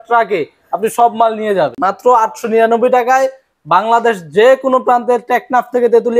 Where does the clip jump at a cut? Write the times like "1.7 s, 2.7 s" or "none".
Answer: 1.7 s